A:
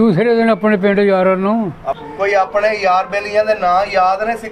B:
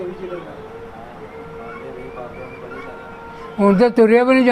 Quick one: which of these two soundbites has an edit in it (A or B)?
A